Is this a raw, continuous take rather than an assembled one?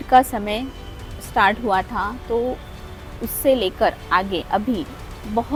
yes; 0 cuts

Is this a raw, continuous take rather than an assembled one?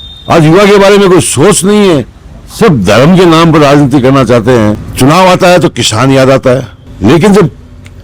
no; 2 cuts; at 4.8 s, 6.8 s

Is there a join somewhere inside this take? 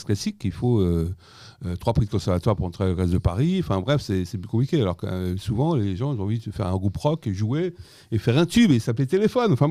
no; 0 cuts

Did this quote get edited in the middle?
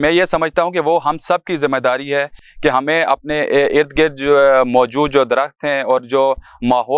no; 0 cuts

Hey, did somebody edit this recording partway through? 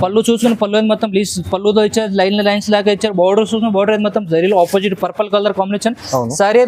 no; 0 cuts

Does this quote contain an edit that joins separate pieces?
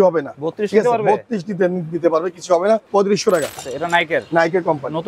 yes; 2 cuts; at 2.9 s, 3.7 s

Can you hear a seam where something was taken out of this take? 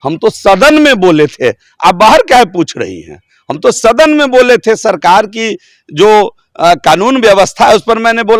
no; 0 cuts

